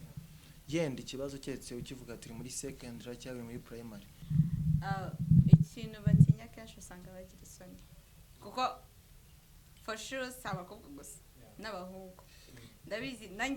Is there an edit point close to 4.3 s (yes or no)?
yes